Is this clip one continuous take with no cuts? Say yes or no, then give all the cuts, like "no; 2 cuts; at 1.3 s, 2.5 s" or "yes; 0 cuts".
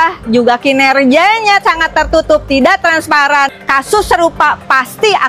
no; 1 cut; at 3.6 s